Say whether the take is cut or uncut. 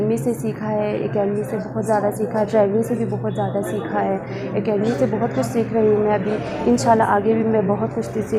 uncut